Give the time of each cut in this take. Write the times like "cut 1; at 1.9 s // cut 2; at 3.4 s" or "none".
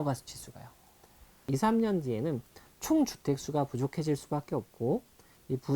cut 1; at 1.4 s